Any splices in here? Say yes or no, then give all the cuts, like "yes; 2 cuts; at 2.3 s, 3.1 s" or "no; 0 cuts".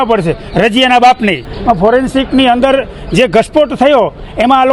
yes; 1 cut; at 1.4 s